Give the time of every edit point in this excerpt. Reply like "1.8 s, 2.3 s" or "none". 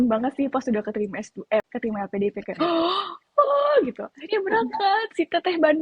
1.7 s